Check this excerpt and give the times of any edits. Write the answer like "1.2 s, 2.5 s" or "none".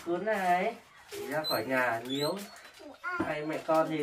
1.3 s